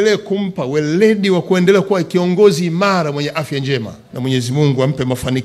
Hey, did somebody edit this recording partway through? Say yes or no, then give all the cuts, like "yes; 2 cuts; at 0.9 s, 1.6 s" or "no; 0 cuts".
yes; 1 cut; at 4.0 s